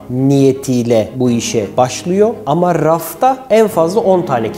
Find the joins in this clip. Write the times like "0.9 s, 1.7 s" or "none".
none